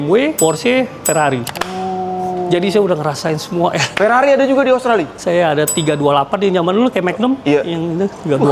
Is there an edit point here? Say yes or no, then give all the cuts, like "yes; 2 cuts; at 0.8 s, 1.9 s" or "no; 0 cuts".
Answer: no; 0 cuts